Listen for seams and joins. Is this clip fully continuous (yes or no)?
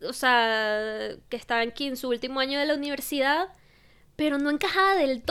yes